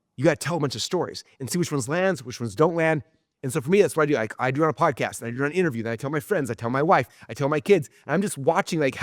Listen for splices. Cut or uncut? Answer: uncut